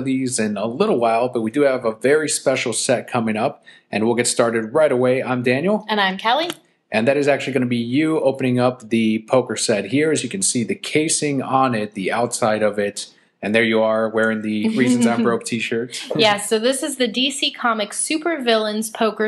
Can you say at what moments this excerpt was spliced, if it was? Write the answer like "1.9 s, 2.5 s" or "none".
none